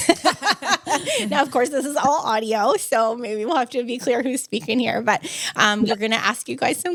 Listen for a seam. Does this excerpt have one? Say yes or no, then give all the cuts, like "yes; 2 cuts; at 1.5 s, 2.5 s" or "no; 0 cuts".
no; 0 cuts